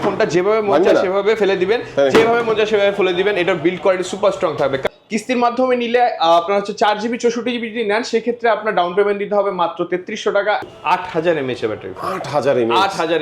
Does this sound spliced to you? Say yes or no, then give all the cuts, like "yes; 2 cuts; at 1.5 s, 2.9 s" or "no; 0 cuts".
yes; 2 cuts; at 4.8 s, 10.6 s